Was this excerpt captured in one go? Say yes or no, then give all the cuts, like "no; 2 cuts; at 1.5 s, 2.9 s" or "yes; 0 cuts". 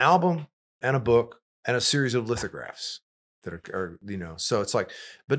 yes; 0 cuts